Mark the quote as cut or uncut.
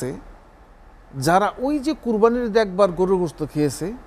uncut